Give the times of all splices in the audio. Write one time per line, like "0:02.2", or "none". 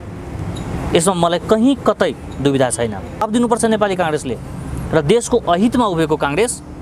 0:03.2